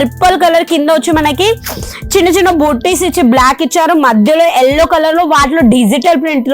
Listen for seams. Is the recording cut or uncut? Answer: uncut